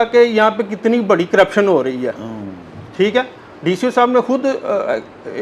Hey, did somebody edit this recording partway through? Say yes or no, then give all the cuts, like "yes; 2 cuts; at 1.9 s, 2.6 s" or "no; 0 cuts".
no; 0 cuts